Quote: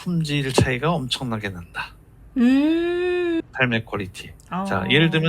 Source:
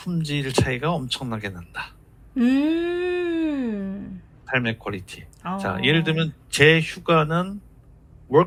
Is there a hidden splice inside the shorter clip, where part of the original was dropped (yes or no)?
yes